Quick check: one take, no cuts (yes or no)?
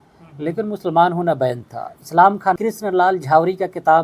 no